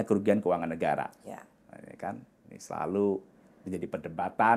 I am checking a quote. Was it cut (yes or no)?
no